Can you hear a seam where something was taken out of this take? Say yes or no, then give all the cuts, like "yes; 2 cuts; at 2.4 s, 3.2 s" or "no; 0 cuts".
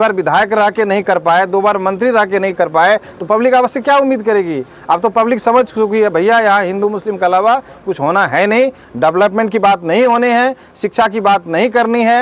no; 0 cuts